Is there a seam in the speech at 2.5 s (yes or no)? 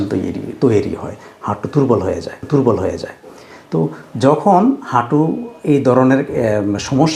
no